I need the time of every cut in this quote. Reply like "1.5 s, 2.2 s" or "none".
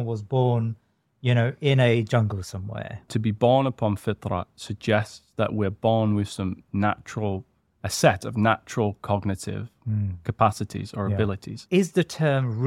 3.1 s, 11.6 s